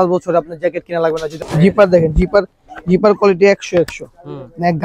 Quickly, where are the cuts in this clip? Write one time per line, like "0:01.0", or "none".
0:01.3